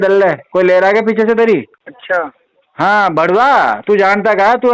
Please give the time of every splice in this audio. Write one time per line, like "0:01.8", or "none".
0:01.7